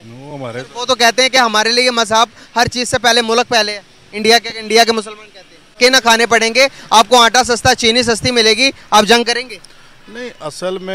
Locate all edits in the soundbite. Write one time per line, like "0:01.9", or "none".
0:05.8